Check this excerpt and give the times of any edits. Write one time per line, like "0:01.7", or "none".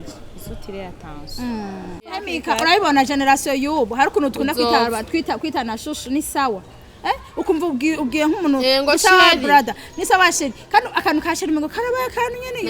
0:02.3